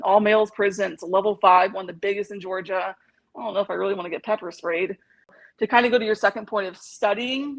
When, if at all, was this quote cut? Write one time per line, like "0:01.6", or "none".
0:05.3